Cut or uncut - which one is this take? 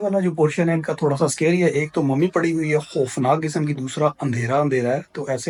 uncut